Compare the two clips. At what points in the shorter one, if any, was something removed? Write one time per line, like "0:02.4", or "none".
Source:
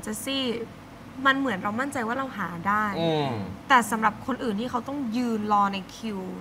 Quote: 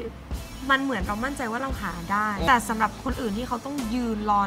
0:02.5